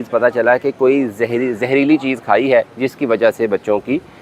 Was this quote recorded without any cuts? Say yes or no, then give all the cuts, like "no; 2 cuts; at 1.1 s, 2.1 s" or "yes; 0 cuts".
yes; 0 cuts